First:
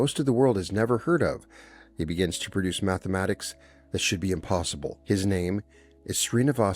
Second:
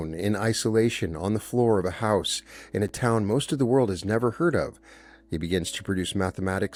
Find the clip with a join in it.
first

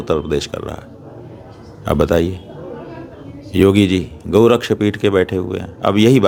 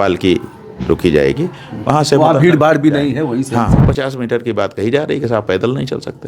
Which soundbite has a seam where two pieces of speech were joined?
second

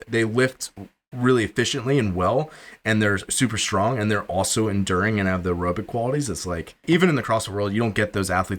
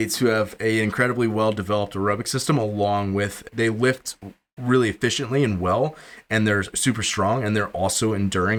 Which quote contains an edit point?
first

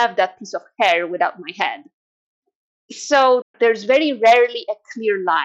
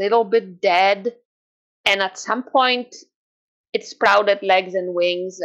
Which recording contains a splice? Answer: first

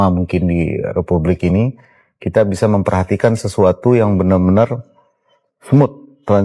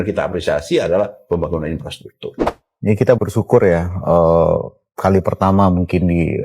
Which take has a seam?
second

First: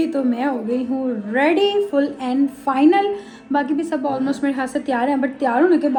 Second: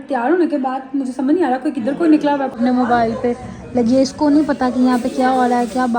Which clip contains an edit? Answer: second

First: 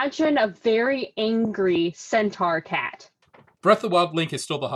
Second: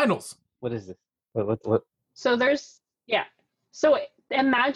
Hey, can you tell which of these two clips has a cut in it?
first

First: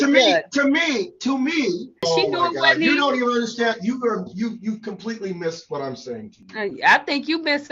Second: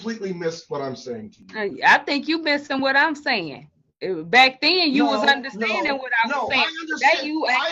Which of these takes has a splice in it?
first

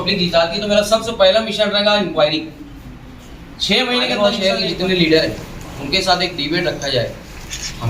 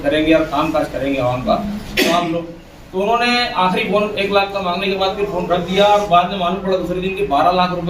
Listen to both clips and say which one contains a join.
first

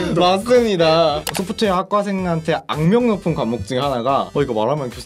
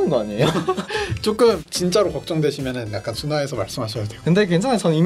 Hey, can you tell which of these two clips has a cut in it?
first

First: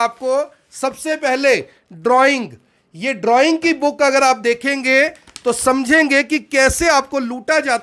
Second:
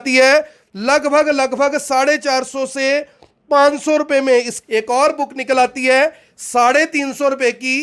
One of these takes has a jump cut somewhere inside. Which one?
second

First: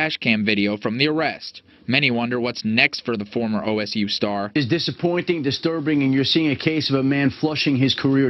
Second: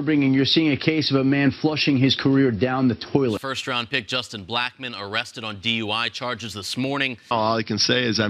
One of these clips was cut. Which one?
second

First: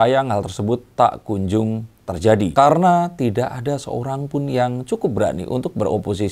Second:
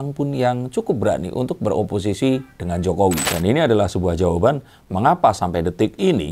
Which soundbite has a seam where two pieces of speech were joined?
second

